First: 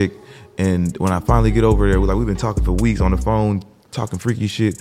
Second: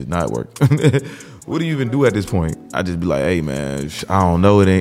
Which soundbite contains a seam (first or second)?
second